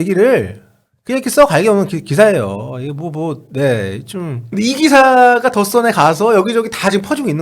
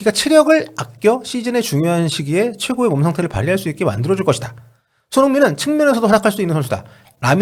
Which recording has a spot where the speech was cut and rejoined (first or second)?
first